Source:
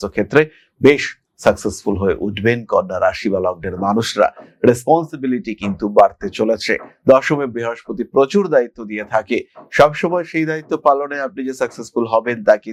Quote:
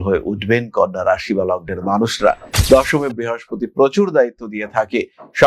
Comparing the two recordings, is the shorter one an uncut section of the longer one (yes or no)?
no